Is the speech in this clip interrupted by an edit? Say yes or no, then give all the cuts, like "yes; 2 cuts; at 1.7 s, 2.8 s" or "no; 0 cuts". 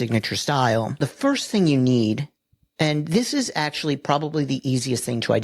yes; 1 cut; at 1.0 s